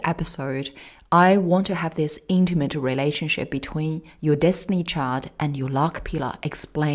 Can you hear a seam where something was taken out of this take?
no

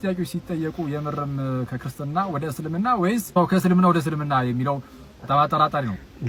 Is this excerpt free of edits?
yes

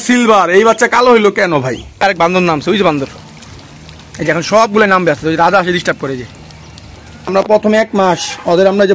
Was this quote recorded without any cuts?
no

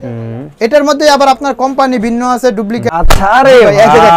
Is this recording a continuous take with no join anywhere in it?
no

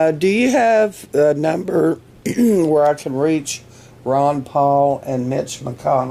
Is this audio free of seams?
no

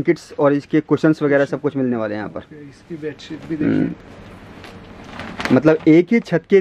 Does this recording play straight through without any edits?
yes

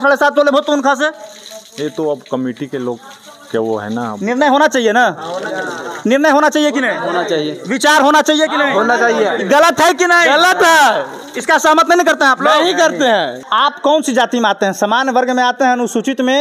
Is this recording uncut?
no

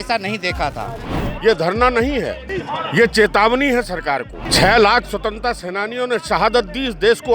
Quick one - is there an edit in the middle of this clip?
yes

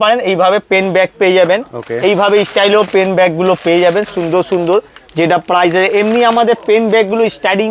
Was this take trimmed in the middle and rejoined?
no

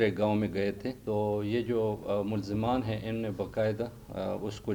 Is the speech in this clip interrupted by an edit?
yes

